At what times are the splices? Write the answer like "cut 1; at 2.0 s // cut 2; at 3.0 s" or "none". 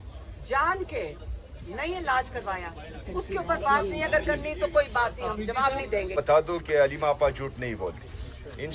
cut 1; at 6.1 s